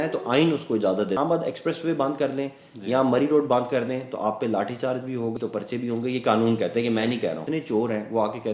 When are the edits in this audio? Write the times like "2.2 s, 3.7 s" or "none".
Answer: 1.2 s, 5.4 s, 7.4 s